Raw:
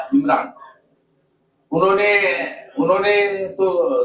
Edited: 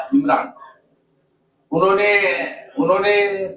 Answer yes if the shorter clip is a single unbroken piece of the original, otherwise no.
yes